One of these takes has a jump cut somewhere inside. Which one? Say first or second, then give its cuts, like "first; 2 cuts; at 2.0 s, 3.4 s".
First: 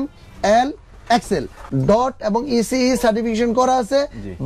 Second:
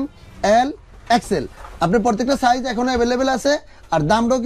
first; 1 cut; at 1.6 s